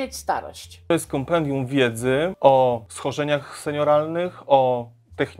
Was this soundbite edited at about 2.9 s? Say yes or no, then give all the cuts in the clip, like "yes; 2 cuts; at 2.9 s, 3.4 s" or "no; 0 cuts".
yes; 3 cuts; at 0.9 s, 2.3 s, 2.9 s